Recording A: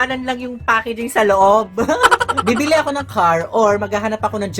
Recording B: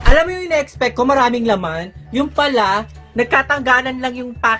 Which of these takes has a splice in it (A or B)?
A